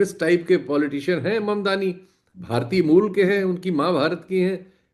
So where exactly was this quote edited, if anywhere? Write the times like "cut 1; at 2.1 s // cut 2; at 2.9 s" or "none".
none